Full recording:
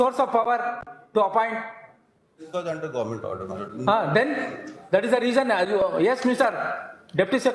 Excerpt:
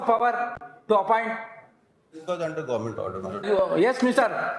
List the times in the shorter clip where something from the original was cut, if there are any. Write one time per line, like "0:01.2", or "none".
0:03.5